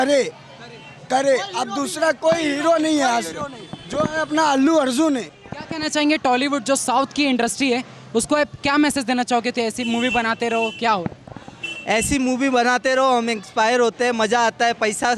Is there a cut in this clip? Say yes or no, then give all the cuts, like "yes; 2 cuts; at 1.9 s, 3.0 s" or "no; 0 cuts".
no; 0 cuts